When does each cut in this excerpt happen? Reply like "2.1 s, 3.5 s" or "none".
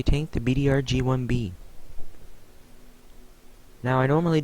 1.0 s

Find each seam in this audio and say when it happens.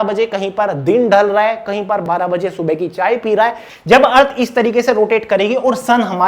2.0 s, 3.7 s

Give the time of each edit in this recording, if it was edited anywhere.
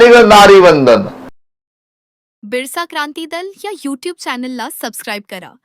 1.3 s

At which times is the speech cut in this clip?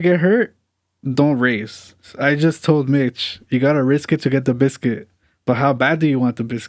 2.1 s

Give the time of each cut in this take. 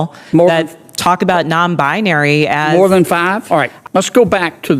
3.4 s

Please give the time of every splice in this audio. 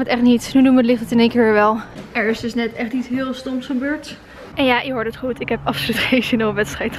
2.0 s, 4.4 s

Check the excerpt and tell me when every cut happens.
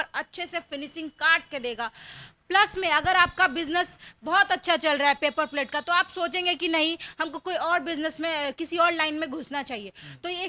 none

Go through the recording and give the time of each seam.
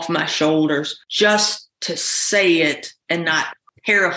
1.0 s

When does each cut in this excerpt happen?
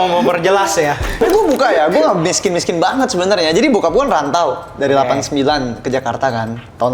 1.2 s

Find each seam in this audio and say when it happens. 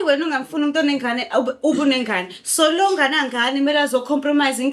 none

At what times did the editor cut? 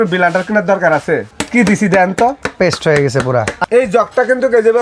1.3 s, 3.6 s

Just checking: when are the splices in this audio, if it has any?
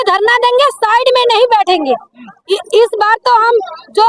none

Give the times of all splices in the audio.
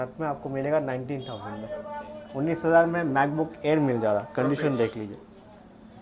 none

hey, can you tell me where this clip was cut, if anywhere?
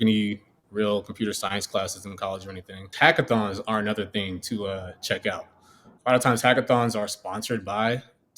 2.9 s

